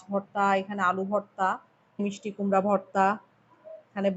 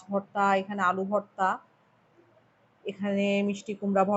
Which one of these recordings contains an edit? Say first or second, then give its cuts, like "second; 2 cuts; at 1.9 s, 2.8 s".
first; 1 cut; at 2.0 s